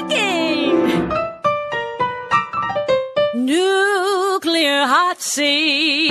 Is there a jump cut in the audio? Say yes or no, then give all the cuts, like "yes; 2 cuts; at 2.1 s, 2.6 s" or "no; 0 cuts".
no; 0 cuts